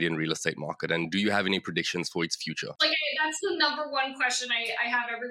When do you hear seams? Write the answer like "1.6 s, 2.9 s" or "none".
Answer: 2.8 s